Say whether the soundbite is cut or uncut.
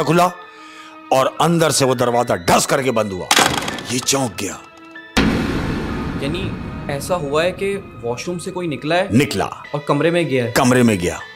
uncut